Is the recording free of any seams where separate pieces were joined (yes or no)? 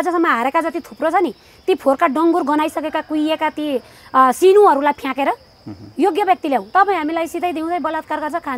no